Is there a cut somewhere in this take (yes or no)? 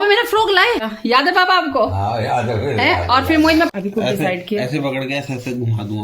yes